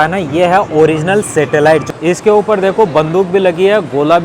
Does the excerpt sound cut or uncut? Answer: cut